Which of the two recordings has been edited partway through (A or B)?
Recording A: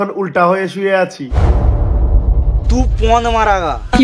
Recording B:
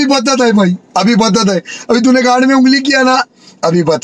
A